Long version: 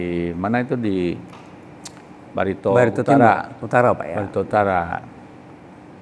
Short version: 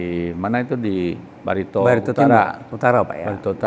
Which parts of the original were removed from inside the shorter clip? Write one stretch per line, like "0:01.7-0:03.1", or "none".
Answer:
0:01.3-0:02.2